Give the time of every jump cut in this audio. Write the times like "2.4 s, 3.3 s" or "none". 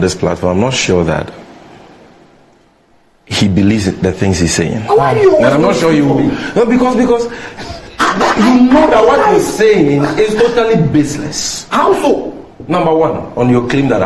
none